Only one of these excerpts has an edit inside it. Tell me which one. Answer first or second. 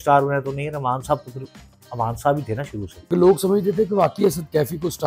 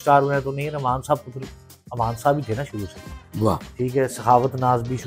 first